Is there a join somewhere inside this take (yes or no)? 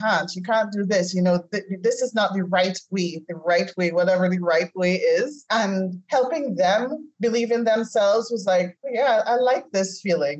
yes